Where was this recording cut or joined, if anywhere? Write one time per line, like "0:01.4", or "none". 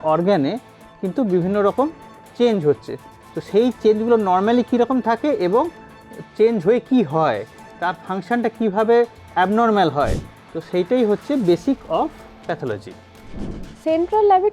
none